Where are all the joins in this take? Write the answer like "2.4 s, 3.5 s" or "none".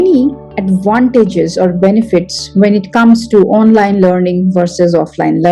none